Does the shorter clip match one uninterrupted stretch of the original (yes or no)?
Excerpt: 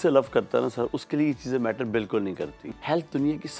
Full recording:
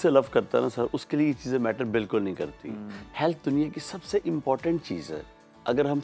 no